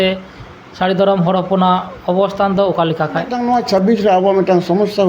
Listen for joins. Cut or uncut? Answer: cut